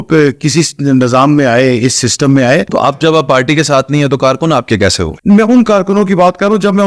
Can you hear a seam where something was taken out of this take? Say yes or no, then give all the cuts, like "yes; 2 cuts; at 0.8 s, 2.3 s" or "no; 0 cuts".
yes; 2 cuts; at 2.9 s, 5.1 s